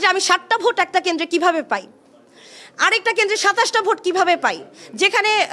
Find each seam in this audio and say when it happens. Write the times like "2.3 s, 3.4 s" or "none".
none